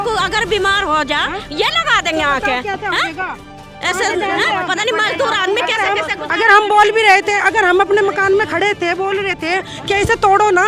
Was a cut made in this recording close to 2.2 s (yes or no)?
no